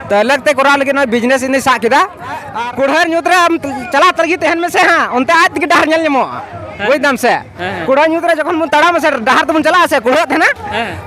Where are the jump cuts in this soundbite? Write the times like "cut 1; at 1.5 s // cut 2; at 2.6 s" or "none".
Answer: cut 1; at 2.5 s